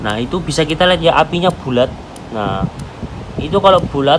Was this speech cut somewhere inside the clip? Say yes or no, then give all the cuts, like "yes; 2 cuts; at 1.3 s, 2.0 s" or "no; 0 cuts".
no; 0 cuts